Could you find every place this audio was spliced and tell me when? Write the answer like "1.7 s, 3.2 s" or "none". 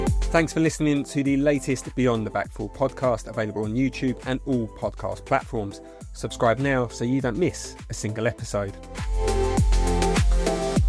none